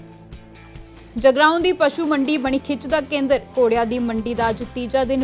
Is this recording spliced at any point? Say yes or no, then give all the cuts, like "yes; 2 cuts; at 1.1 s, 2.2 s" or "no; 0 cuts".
yes; 1 cut; at 0.9 s